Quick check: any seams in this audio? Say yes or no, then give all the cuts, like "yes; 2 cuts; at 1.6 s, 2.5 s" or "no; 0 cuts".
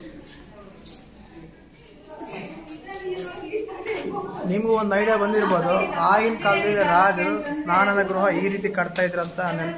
yes; 1 cut; at 2.0 s